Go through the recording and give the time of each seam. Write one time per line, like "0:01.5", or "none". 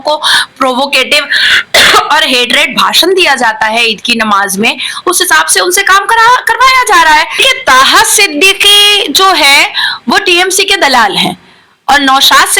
0:07.4